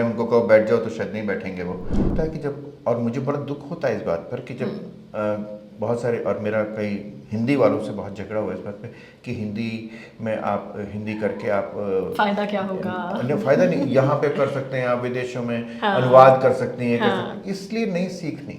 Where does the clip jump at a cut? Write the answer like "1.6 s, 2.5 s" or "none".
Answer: 2.1 s